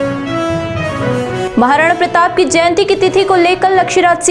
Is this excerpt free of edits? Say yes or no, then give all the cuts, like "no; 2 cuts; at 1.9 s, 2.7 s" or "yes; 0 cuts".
yes; 0 cuts